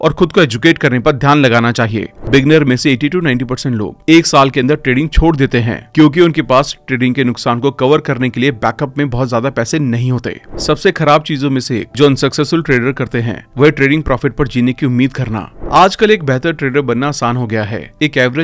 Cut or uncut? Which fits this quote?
cut